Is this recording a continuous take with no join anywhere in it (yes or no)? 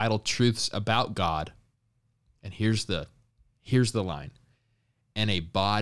yes